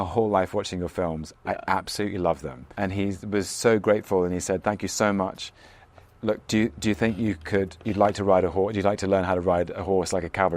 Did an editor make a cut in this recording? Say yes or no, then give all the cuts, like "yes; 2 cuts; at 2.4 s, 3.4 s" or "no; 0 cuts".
yes; 2 cuts; at 2.6 s, 5.8 s